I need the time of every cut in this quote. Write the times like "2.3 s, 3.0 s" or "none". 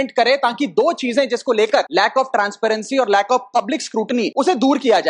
1.9 s, 4.3 s

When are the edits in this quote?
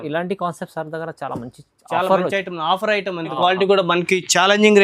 3.3 s

